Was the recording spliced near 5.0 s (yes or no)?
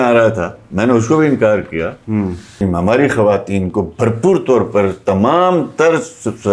no